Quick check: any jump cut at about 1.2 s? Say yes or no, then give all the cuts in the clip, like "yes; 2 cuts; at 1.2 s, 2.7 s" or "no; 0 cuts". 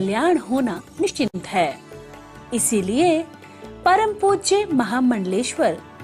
yes; 1 cut; at 1.2 s